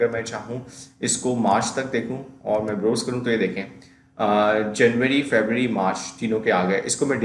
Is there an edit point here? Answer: no; 0 cuts

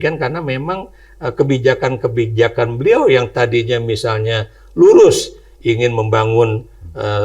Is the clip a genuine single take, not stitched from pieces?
yes; 0 cuts

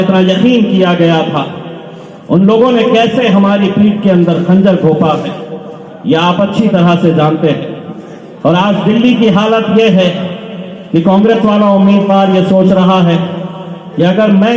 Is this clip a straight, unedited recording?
yes; 0 cuts

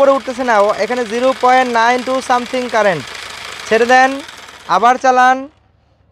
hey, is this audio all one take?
yes; 0 cuts

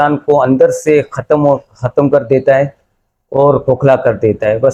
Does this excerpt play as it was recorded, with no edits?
yes; 0 cuts

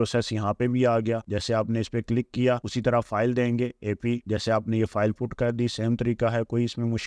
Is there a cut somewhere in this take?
no; 0 cuts

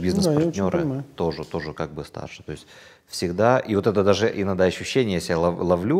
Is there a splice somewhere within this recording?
no; 0 cuts

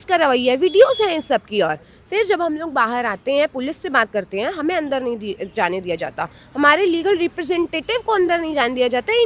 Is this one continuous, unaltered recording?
yes; 0 cuts

